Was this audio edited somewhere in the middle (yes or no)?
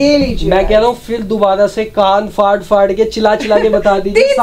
no